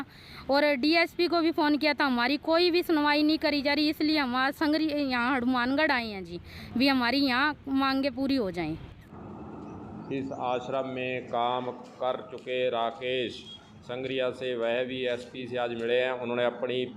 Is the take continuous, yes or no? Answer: yes